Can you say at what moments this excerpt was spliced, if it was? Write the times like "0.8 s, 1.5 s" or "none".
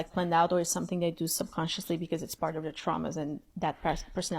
3.5 s